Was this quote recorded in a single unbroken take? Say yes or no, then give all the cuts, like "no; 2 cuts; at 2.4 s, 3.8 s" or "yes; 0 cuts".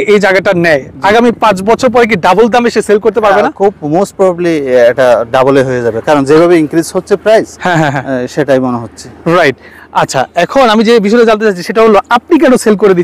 yes; 0 cuts